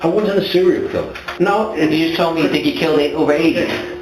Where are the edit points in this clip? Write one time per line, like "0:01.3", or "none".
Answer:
0:01.3